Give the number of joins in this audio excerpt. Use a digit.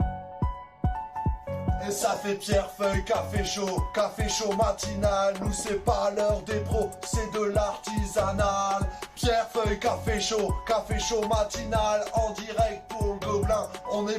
1